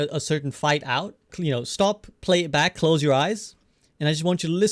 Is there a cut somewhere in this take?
yes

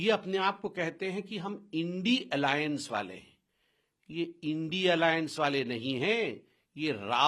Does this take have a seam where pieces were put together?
no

